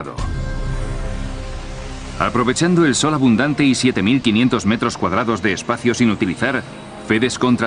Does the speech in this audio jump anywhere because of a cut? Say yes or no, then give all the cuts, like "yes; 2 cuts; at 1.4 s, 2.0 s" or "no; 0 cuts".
no; 0 cuts